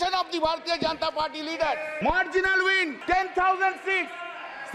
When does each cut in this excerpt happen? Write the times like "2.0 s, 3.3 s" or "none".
1.9 s, 3.0 s